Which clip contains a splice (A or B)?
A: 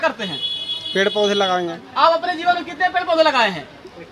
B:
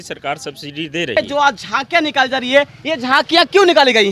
B